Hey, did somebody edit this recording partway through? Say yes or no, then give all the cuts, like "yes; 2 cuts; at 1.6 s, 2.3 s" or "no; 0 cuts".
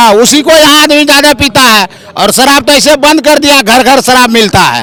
no; 0 cuts